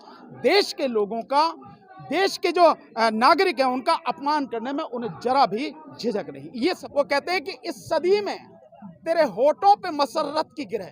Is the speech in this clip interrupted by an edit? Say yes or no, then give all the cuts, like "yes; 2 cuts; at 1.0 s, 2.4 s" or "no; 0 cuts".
yes; 1 cut; at 6.8 s